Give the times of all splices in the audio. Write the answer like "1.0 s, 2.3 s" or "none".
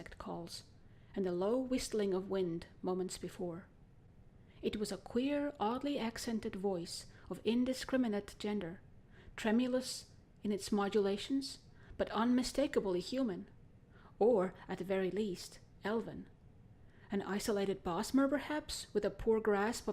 18.0 s